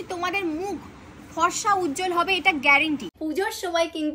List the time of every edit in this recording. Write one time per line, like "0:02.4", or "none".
0:03.2